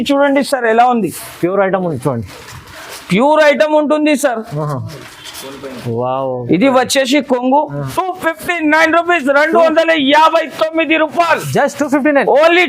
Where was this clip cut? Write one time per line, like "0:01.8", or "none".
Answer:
0:07.9